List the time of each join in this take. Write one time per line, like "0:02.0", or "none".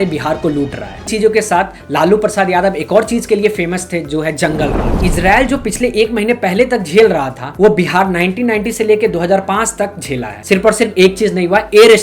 0:01.1